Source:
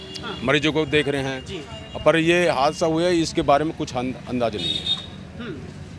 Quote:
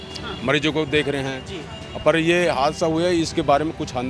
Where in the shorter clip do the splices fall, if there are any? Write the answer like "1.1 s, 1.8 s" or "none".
none

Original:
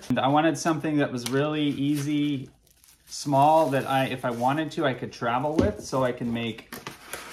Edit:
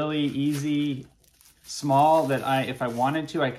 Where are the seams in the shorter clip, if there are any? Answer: none

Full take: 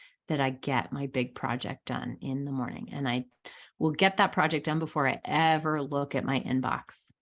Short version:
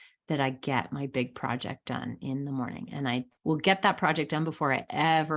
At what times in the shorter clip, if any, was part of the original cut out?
3.3 s

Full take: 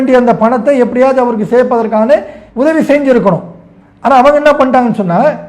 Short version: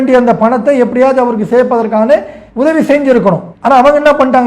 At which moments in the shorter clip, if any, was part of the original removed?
3.5 s

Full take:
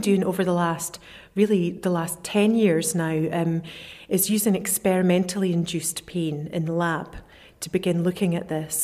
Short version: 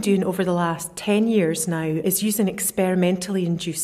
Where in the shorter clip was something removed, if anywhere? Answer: 0.9 s, 2.0 s

